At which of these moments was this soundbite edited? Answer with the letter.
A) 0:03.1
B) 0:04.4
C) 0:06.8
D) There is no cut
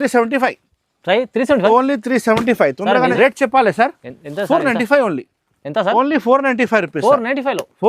A